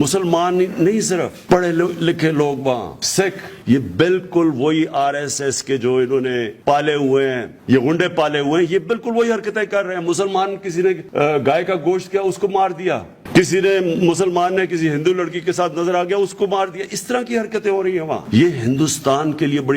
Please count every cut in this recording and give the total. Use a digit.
4